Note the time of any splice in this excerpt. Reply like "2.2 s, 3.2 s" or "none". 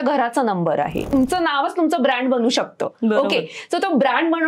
1.1 s